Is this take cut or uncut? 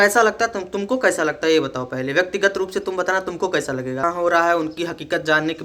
cut